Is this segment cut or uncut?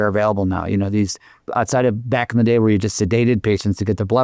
uncut